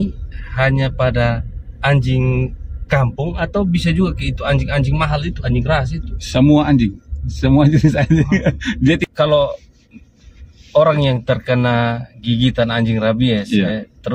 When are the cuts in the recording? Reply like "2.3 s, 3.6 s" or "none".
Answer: 9.0 s